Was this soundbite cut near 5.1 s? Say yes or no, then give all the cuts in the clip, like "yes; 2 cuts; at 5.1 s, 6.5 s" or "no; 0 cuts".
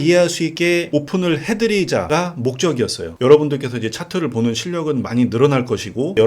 no; 3 cuts; at 0.8 s, 2.1 s, 3.1 s